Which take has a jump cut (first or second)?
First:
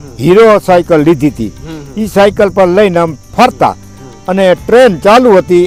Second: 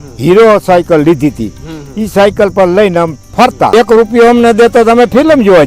second